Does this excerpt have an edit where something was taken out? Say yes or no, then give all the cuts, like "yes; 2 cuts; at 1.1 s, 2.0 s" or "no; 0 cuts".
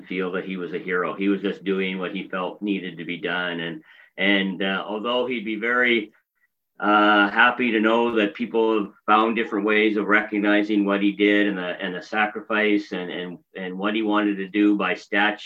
no; 0 cuts